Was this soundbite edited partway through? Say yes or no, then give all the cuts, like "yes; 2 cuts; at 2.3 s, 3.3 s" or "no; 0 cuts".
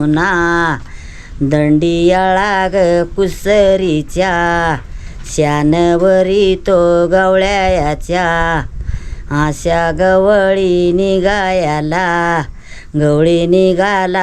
no; 0 cuts